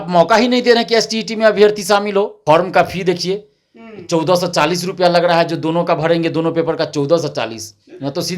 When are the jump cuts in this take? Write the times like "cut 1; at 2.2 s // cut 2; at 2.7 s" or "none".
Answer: cut 1; at 2.4 s